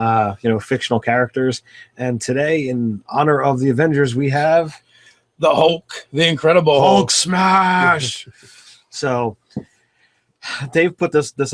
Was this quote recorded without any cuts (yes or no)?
yes